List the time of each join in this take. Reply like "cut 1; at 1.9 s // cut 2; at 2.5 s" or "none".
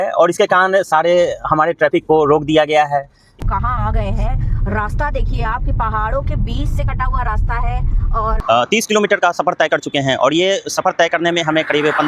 cut 1; at 3.2 s // cut 2; at 8.4 s